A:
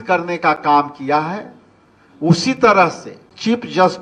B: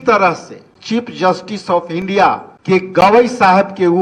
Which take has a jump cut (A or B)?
B